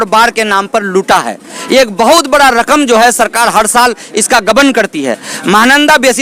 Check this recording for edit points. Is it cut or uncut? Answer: uncut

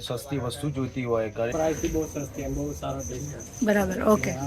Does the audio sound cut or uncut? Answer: cut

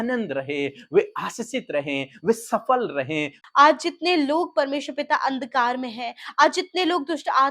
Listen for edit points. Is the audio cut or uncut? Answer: cut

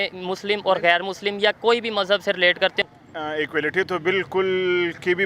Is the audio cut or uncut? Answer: cut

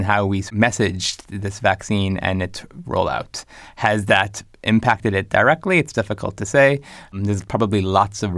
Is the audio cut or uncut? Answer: uncut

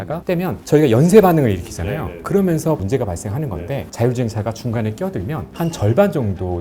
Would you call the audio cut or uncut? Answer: uncut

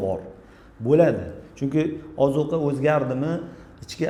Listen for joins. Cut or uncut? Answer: uncut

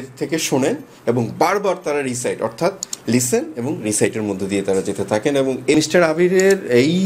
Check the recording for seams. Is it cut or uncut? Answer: cut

